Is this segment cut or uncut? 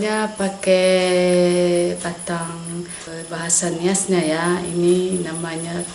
cut